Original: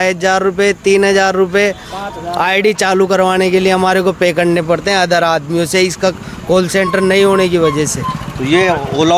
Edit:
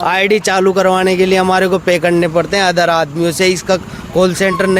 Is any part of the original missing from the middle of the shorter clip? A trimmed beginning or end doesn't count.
no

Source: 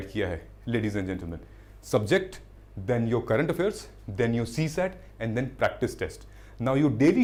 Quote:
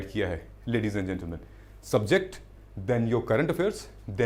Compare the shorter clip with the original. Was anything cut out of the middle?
no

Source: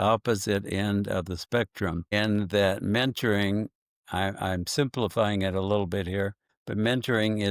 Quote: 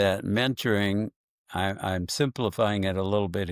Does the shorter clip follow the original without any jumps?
yes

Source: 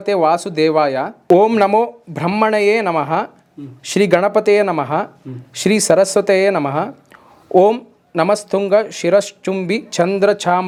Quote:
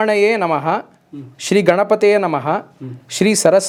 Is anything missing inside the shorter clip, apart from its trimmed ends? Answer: no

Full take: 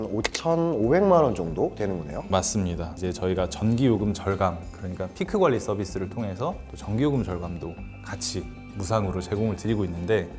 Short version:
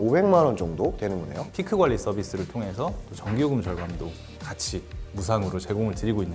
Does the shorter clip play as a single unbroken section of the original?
no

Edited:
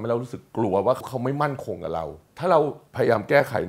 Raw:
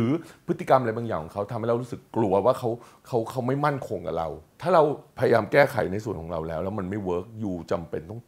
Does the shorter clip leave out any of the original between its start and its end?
yes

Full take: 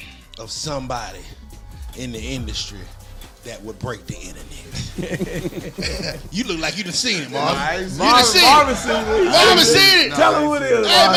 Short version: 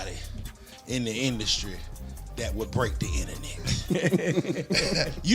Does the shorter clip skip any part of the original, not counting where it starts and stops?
no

